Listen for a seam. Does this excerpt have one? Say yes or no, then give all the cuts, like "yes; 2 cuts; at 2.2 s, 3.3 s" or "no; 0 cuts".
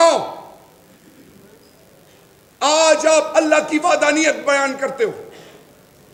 no; 0 cuts